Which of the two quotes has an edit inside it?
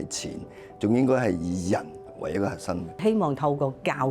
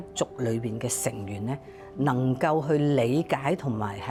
first; 1 cut; at 3.0 s

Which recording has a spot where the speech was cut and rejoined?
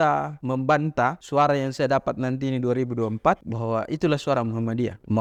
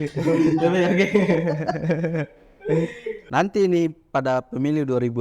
second; 1 cut; at 3.2 s

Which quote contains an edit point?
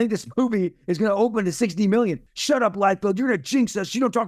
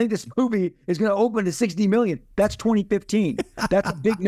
first; 1 cut; at 2.2 s

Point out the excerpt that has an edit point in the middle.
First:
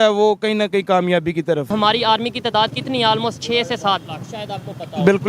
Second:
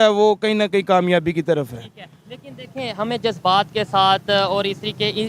first; 1 cut; at 1.7 s

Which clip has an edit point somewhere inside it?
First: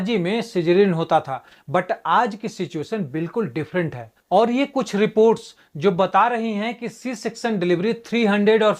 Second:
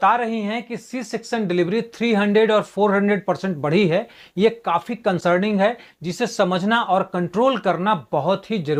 first; 1 cut; at 4.1 s

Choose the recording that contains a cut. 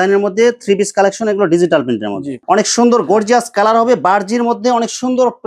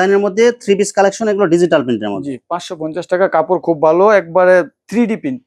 first; 1 cut; at 2.4 s

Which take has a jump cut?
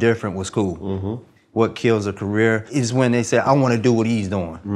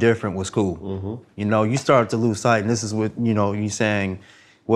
first; 2 cuts; at 1.2 s, 2.6 s

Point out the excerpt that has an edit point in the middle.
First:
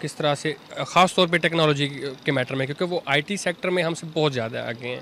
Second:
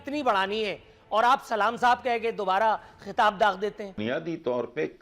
second; 1 cut; at 3.9 s

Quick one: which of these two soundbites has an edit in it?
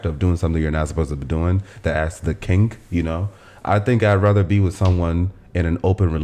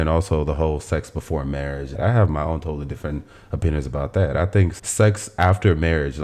second; 2 cuts; at 1.9 s, 4.8 s

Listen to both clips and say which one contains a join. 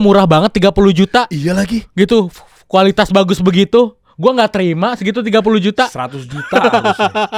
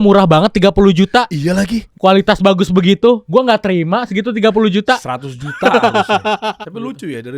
second; 3 cuts; at 1.8 s, 3.2 s, 6.6 s

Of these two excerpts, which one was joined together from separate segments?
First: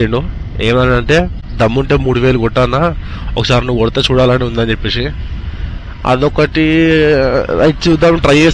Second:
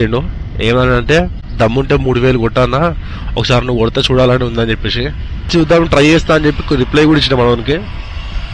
second; 1 cut; at 5.5 s

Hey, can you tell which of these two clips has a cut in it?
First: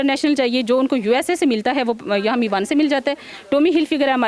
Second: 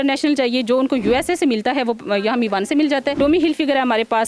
second; 1 cut; at 3.1 s

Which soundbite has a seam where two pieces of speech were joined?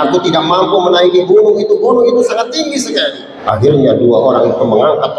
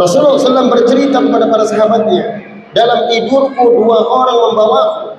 first; 1 cut; at 3.3 s

